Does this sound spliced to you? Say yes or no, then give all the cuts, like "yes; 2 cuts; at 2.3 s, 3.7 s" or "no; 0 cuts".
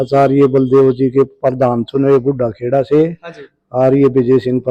no; 0 cuts